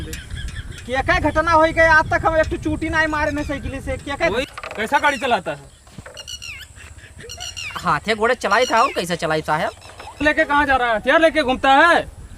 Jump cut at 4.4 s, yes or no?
yes